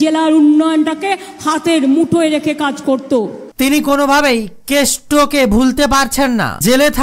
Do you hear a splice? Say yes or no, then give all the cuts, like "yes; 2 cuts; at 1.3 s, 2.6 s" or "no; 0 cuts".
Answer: no; 0 cuts